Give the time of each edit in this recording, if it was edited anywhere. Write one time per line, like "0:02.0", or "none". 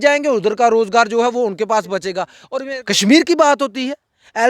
0:02.4